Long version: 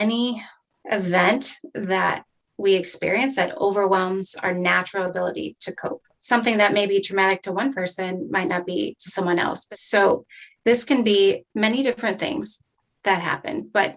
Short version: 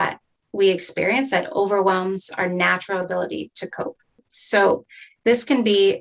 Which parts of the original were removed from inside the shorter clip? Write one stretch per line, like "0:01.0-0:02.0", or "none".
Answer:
0:06.2-0:09.6